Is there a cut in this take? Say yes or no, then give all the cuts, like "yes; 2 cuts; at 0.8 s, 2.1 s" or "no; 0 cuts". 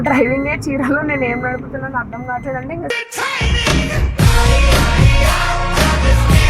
no; 0 cuts